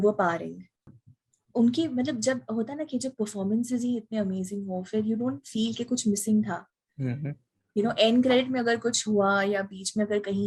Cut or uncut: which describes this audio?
cut